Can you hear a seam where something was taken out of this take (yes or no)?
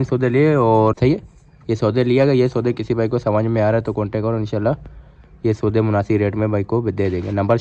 yes